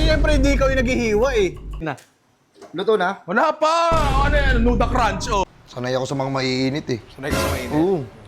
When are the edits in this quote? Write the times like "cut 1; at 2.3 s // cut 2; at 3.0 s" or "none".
cut 1; at 1.9 s // cut 2; at 5.4 s

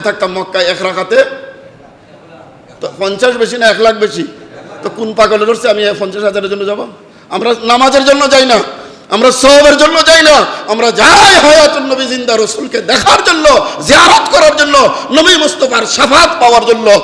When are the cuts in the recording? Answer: none

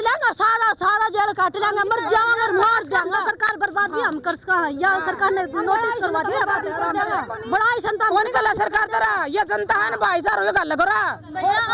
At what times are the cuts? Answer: none

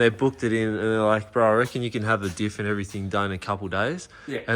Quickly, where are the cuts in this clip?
none

